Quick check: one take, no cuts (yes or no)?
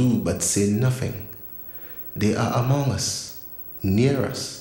yes